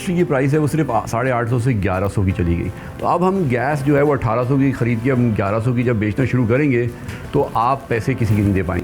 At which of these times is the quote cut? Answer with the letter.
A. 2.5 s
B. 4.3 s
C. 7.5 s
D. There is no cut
D